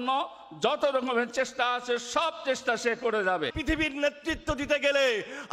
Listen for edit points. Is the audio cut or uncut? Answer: cut